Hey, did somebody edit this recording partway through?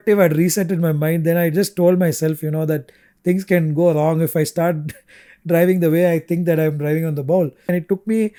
no; 0 cuts

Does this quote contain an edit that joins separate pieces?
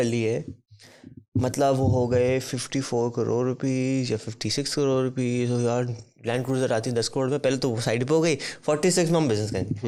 no; 0 cuts

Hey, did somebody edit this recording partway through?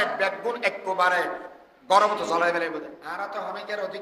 yes; 1 cut; at 3.0 s

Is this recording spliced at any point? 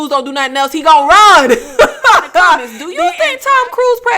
yes; 1 cut; at 2.8 s

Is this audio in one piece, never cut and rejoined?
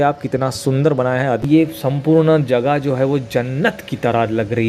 no; 1 cut; at 1.4 s

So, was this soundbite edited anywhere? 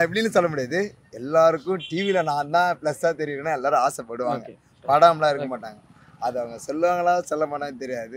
no; 0 cuts

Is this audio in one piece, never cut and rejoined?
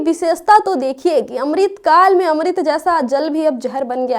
yes; 0 cuts

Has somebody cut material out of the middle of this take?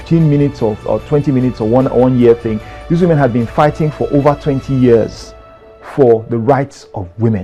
no; 0 cuts

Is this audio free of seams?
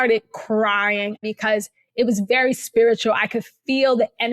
no; 1 cut; at 1.2 s

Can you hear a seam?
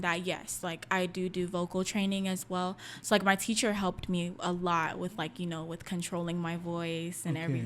no; 0 cuts

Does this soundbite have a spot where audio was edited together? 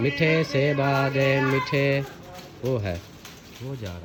no; 0 cuts

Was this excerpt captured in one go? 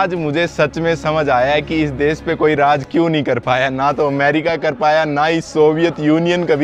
yes; 0 cuts

